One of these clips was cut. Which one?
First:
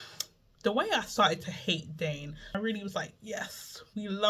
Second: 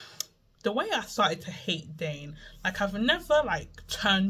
first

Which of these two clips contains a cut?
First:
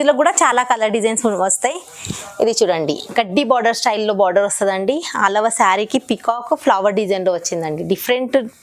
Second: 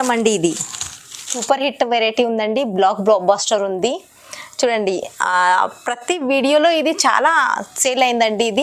second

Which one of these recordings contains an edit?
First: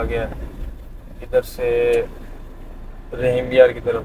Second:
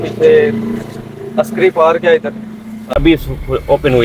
second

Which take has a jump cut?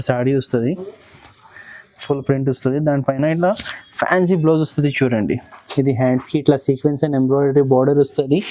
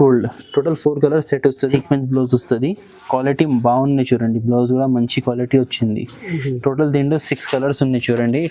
second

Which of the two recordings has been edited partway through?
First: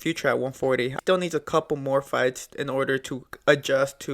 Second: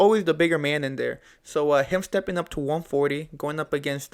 first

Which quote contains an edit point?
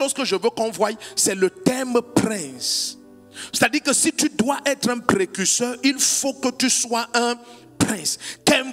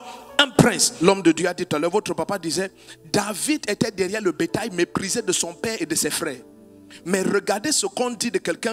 second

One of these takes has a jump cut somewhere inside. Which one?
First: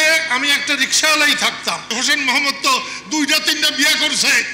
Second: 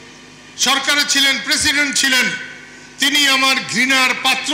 first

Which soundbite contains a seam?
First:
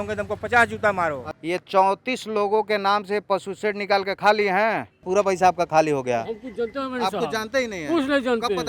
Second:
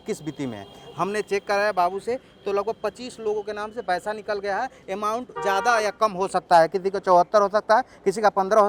first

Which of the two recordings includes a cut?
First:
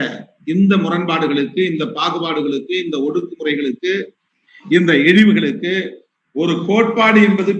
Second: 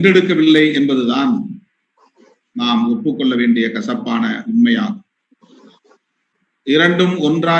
second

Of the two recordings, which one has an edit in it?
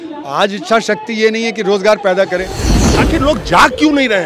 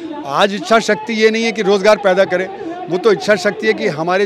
first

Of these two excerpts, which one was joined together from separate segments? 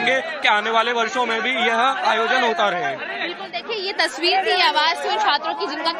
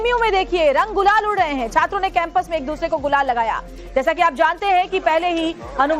second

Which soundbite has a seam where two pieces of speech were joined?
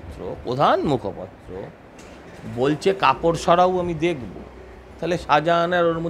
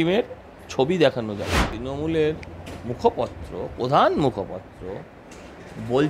second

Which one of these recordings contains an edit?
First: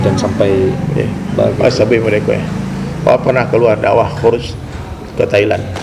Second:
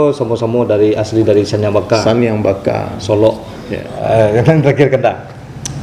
second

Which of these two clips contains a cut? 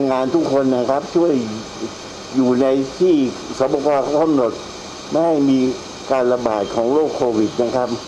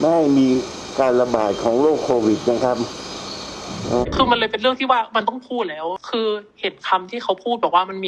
second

